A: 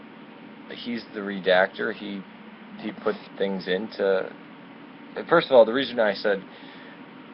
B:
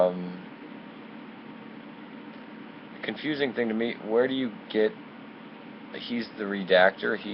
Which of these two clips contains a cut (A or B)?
B